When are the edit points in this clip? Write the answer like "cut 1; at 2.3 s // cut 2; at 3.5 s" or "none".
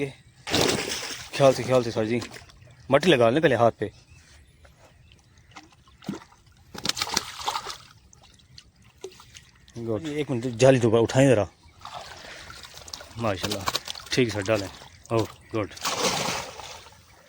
cut 1; at 10.3 s